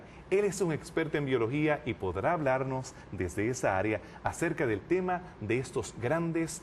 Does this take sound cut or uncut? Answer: cut